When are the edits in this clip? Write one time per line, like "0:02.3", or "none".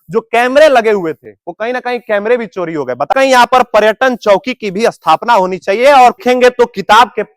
0:03.1
0:06.2